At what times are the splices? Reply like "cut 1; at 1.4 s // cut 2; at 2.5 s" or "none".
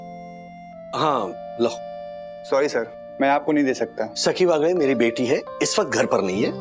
cut 1; at 4.1 s